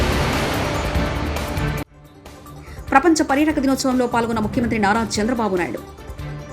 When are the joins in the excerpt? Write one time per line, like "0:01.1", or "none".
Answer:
0:01.7